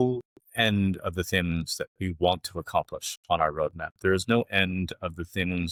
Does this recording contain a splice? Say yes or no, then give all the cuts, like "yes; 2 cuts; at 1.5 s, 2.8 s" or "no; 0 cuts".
no; 0 cuts